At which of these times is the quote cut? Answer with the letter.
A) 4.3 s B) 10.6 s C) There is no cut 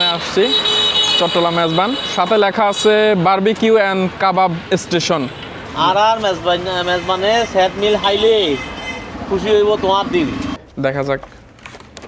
B